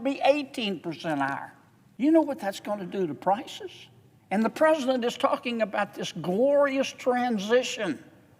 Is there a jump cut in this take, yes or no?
no